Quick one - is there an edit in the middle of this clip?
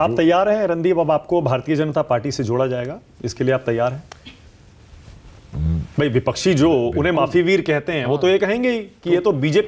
no; 0 cuts

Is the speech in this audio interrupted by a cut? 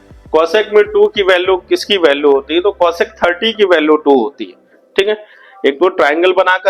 no; 0 cuts

